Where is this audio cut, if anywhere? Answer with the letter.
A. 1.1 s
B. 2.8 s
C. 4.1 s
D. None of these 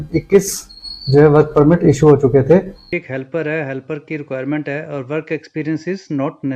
B